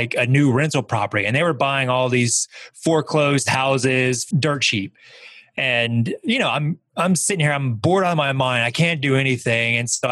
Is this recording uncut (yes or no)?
no